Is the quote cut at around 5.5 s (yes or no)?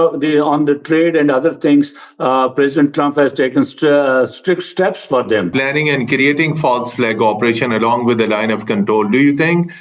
yes